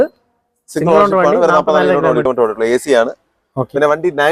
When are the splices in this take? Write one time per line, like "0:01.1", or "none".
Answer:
0:02.3